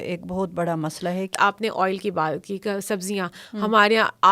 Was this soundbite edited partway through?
yes; 1 cut; at 1.3 s

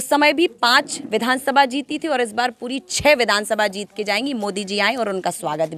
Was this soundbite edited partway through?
no; 0 cuts

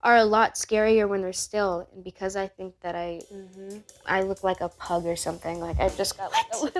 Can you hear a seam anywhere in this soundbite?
no; 0 cuts

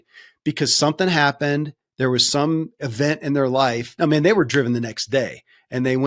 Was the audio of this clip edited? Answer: yes; 1 cut; at 3.9 s

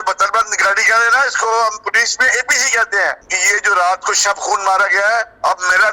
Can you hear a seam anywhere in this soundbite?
yes; 1 cut; at 3.3 s

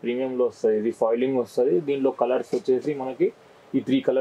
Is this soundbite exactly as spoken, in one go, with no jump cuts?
yes; 0 cuts

